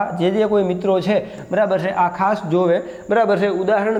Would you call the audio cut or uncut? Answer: uncut